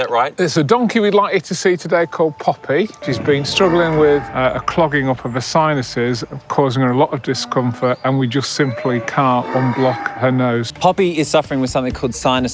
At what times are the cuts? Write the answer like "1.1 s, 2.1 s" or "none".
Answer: 3.0 s, 10.7 s